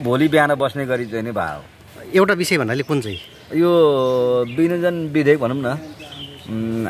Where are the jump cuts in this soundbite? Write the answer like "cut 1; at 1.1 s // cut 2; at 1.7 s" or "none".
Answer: none